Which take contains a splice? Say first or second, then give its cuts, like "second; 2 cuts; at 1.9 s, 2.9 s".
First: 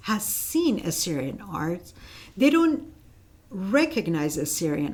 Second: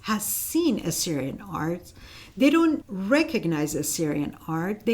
second; 1 cut; at 2.9 s